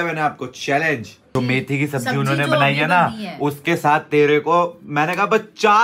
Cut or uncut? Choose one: cut